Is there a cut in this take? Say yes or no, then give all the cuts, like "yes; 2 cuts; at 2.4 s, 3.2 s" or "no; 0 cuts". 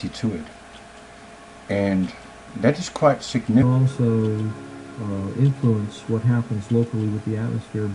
no; 0 cuts